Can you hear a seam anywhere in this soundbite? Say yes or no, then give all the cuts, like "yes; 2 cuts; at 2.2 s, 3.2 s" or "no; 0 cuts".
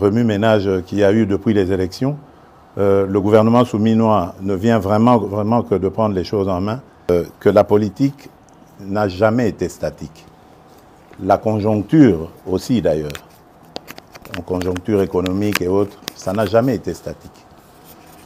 yes; 1 cut; at 7.1 s